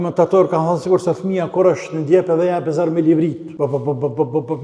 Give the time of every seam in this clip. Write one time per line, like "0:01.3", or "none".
0:03.5